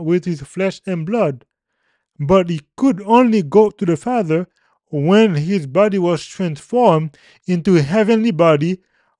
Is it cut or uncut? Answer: uncut